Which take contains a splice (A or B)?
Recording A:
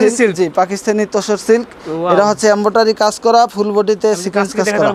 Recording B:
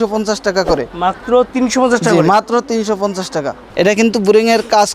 B